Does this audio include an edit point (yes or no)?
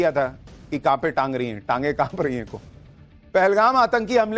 yes